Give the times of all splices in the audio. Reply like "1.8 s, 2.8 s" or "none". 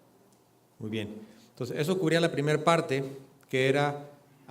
3.4 s